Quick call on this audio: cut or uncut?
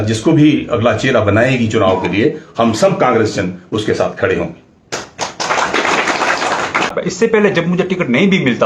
cut